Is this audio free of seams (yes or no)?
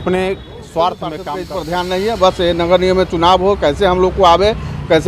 no